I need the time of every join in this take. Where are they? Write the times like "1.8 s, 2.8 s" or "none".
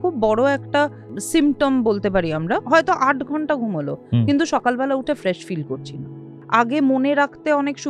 1.1 s, 2.6 s, 6.4 s